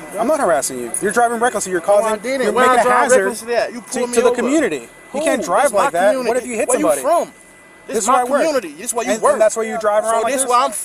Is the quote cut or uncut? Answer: uncut